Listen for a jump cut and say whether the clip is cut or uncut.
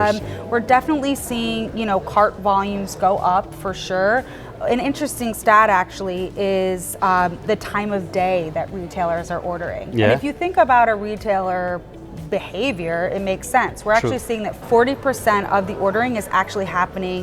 cut